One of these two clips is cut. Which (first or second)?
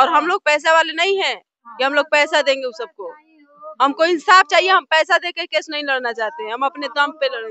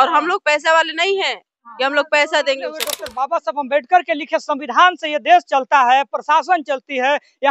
second